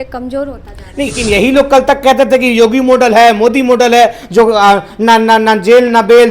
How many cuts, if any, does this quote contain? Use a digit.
1